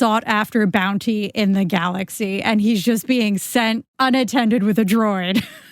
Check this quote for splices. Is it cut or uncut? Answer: cut